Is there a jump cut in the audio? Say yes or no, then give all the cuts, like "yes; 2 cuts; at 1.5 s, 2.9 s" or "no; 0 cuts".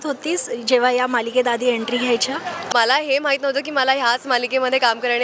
yes; 1 cut; at 2.7 s